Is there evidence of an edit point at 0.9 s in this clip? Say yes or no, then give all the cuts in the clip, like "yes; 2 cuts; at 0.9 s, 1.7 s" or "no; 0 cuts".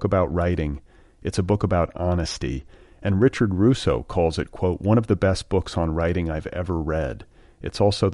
no; 0 cuts